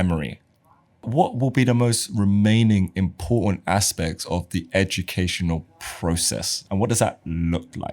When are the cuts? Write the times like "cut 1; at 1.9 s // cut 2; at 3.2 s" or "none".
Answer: cut 1; at 1.1 s